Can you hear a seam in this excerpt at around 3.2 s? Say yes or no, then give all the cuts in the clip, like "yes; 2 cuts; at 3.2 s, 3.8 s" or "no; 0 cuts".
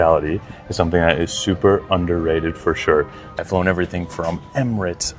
yes; 1 cut; at 3.2 s